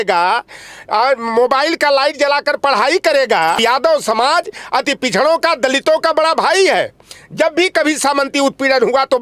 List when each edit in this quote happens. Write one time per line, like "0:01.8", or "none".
0:03.6

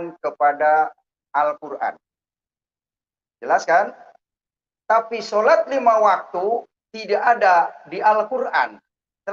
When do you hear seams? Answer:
none

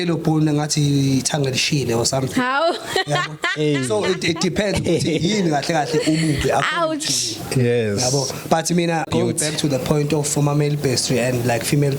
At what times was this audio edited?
0:09.1

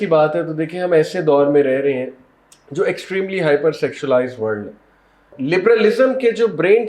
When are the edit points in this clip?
0:05.3

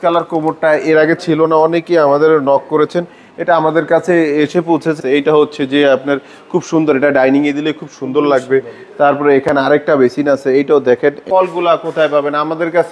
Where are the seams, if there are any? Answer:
0:05.0
0:11.2

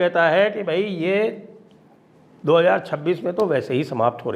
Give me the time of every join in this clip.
none

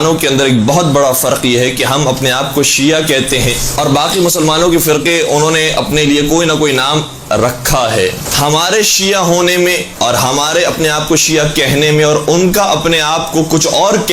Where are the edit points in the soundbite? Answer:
0:01.4

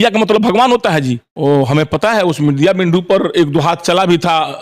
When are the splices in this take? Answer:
0:01.2

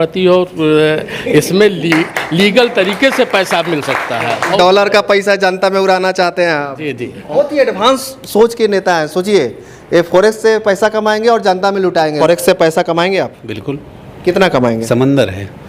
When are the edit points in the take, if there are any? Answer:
0:04.5
0:07.3
0:12.2
0:14.8

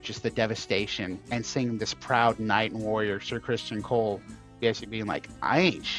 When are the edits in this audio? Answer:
0:01.2

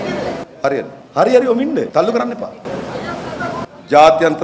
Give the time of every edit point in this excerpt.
0:01.0
0:01.9
0:02.6

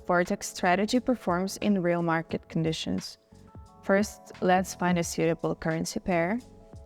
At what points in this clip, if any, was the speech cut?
none

